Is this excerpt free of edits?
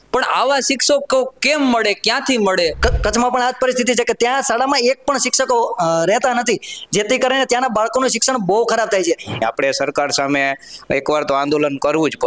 no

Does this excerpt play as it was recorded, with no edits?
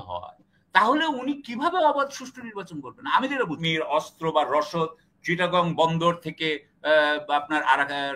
no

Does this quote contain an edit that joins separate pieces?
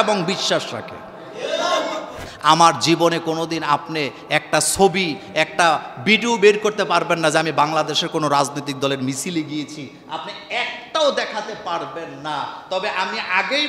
yes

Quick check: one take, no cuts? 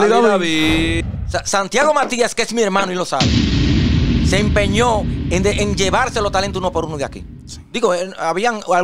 no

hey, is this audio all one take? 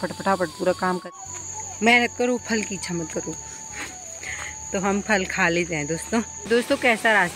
no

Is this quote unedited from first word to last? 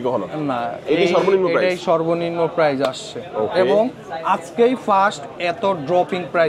yes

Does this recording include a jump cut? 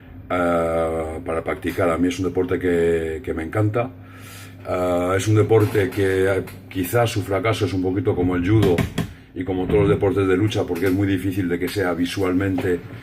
yes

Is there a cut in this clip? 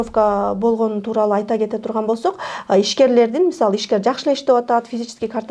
no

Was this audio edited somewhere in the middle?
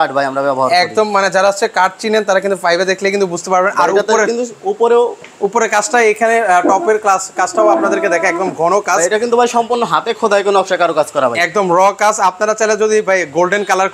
no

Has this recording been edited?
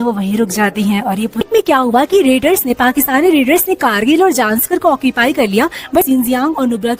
yes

